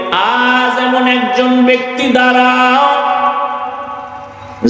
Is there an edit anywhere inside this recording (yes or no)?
no